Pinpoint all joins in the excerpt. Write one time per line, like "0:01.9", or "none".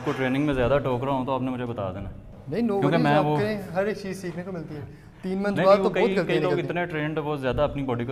none